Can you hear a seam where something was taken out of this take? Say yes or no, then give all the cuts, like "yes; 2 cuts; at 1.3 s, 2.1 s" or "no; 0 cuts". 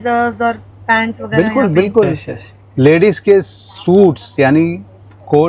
no; 0 cuts